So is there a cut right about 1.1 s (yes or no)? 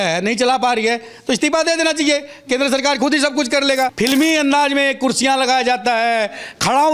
no